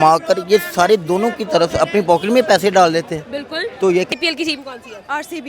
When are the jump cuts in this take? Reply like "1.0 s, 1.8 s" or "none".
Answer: 4.1 s